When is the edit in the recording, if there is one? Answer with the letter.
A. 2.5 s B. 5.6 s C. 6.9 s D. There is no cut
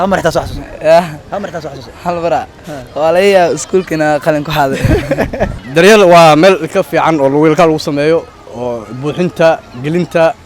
B